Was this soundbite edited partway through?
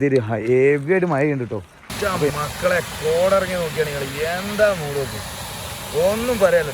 yes; 1 cut; at 2.3 s

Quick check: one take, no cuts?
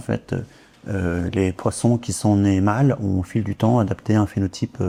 yes; 0 cuts

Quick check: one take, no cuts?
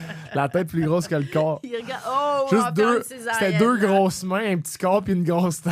yes; 0 cuts

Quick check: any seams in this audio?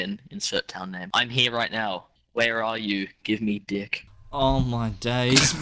yes; 2 cuts; at 1.0 s, 2.1 s

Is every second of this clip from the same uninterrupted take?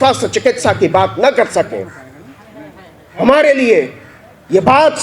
yes; 0 cuts

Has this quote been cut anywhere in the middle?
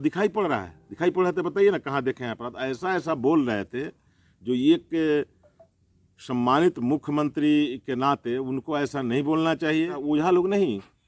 yes; 1 cut; at 10.0 s

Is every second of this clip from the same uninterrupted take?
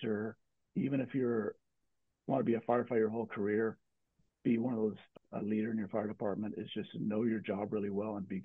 no; 2 cuts; at 1.8 s, 5.1 s

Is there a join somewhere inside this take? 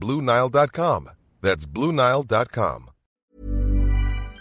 yes; 1 cut; at 3.2 s

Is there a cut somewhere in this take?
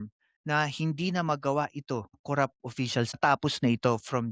yes; 1 cut; at 3.2 s

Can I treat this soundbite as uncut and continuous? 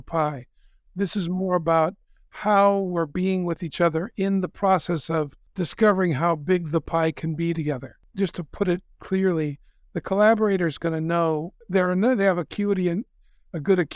no; 3 cuts; at 5.4 s, 7.8 s, 11.6 s

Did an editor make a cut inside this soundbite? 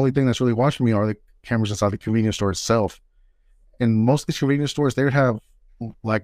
no; 0 cuts

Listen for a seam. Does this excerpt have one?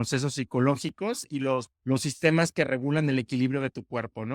yes; 1 cut; at 1.7 s

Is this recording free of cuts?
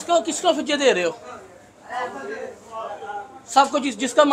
yes; 0 cuts

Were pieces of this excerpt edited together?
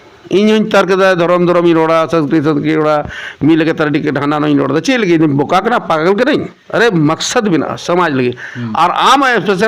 yes; 1 cut; at 6.6 s

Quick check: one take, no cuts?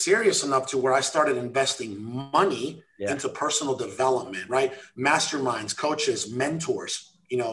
yes; 0 cuts

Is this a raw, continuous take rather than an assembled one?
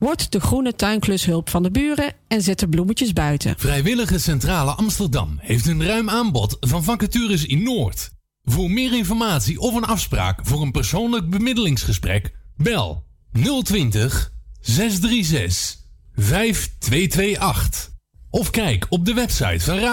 no; 1 cut; at 3.6 s

